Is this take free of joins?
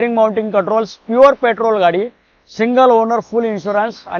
yes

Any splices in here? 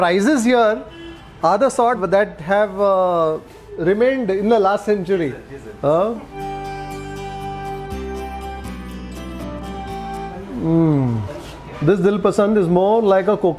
no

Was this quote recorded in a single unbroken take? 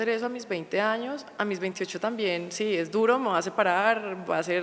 yes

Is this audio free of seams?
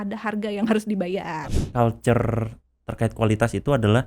no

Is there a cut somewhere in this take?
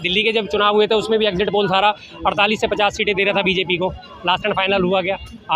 no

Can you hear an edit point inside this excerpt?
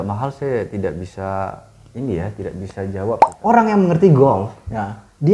yes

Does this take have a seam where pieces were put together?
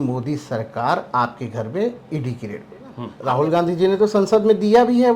yes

